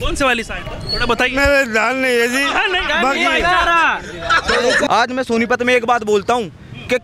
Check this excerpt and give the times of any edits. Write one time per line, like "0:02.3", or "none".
0:04.9